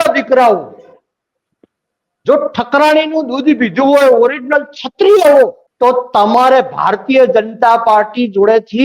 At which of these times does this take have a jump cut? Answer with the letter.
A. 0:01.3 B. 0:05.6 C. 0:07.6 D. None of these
B